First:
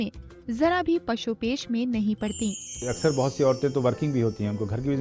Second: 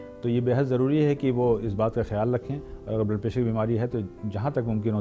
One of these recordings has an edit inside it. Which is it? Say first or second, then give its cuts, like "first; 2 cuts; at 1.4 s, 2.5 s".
first; 1 cut; at 2.9 s